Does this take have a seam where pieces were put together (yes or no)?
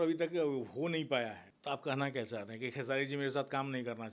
yes